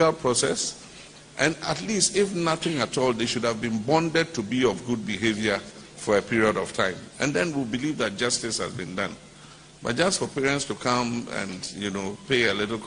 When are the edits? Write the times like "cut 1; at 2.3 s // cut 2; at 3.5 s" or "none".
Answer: none